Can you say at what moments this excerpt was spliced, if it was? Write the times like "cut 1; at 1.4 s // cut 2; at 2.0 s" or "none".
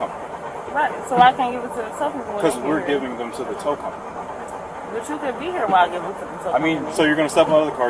none